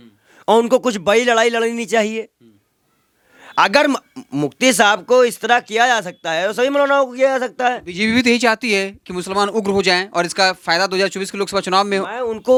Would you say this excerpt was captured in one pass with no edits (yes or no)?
yes